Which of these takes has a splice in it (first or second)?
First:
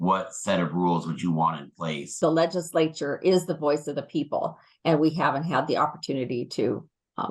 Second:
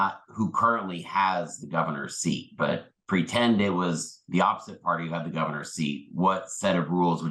first